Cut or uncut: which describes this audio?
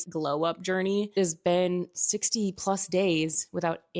cut